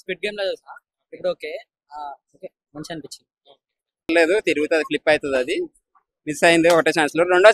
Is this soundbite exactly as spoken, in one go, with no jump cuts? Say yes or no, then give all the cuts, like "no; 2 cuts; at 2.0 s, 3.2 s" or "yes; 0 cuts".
no; 1 cut; at 4.1 s